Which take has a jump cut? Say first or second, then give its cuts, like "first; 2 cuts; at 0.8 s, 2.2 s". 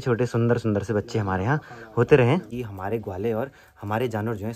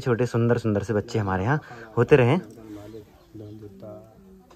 first; 1 cut; at 2.5 s